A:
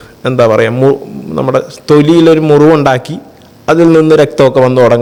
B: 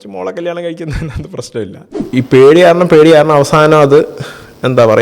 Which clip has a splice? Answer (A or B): B